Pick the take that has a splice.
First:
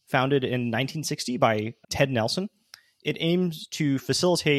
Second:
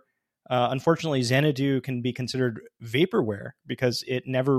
first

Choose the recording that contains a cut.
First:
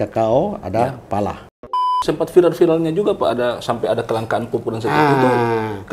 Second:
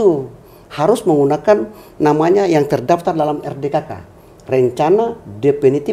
first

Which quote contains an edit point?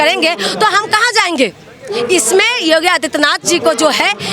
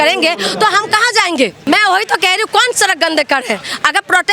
second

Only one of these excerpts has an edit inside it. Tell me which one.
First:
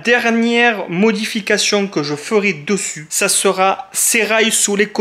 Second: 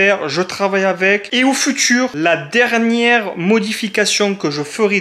second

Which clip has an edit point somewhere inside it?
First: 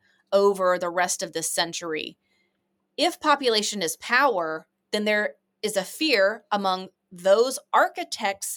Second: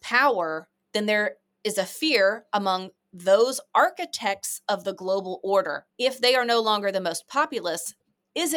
second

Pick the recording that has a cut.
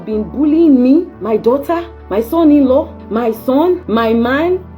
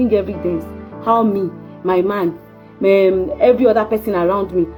first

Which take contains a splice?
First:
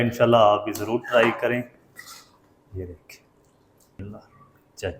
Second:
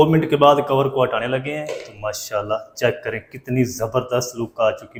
first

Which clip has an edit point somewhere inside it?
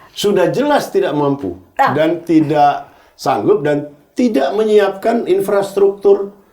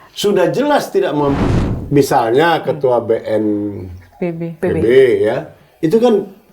second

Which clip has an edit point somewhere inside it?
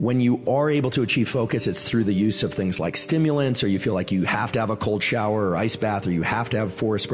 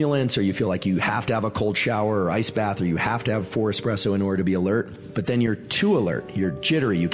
second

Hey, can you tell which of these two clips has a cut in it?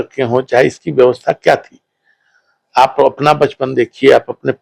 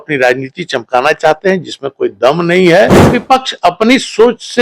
second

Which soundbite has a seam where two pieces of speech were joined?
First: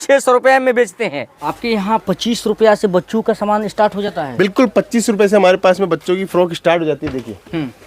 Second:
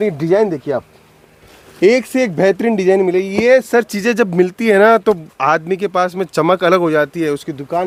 first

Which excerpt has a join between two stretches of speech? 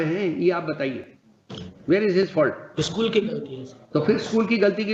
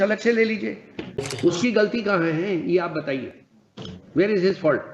second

